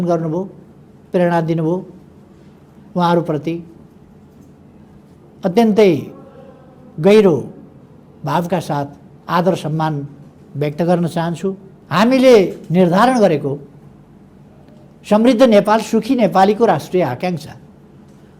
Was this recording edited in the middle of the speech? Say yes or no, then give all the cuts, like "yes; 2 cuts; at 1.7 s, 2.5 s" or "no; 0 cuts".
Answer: yes; 1 cut; at 11.7 s